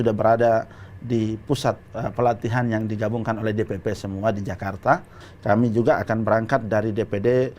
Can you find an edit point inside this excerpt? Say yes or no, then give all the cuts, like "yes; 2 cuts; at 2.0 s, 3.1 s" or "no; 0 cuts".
yes; 1 cut; at 5.2 s